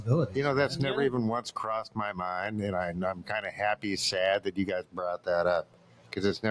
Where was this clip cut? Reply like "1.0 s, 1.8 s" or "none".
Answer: none

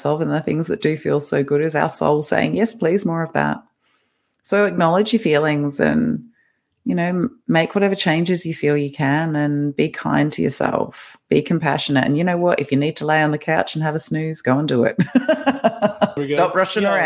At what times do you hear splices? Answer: 16.2 s

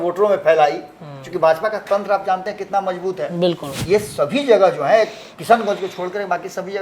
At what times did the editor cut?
3.7 s

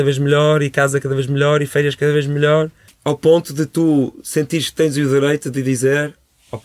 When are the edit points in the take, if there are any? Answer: 2.9 s

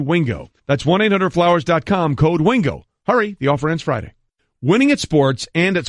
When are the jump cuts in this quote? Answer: 4.4 s

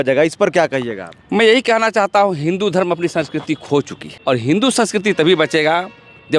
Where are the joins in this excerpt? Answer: 4.0 s

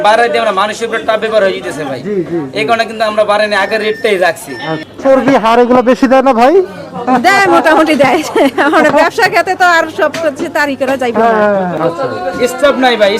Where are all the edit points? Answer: 4.8 s, 11.7 s

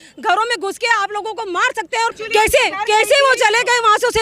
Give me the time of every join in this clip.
2.2 s

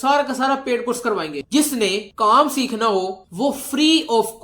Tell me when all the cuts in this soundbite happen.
1.4 s

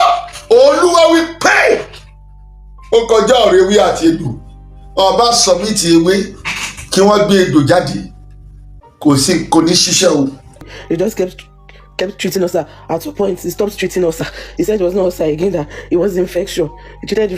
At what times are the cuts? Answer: 10.7 s

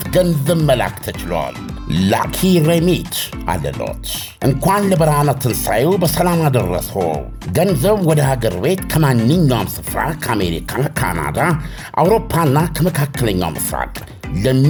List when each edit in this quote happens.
none

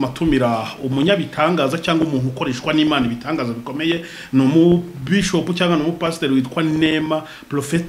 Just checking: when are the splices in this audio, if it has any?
none

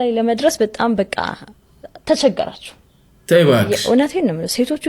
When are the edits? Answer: none

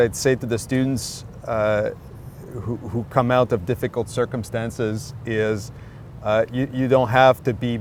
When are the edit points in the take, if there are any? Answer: none

